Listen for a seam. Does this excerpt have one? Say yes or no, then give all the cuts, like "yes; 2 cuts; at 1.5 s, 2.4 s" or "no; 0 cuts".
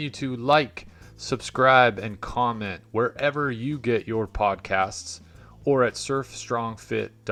no; 0 cuts